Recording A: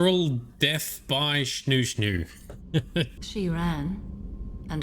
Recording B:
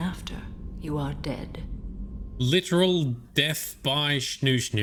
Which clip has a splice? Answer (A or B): A